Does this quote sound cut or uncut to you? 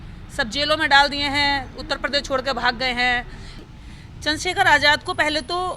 cut